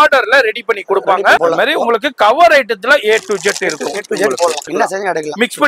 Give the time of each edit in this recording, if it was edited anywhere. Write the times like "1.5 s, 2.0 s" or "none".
1.4 s, 4.6 s